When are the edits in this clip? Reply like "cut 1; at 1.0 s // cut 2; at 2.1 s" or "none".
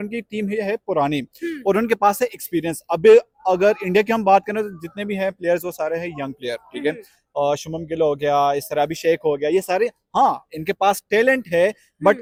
none

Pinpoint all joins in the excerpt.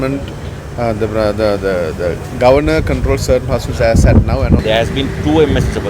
cut 1; at 4.6 s

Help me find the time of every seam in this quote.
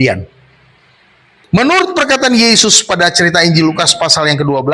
cut 1; at 1.4 s

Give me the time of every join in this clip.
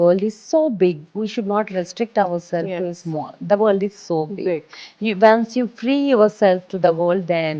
none

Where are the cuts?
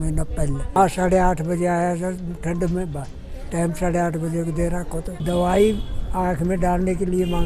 cut 1; at 0.8 s // cut 2; at 5.1 s

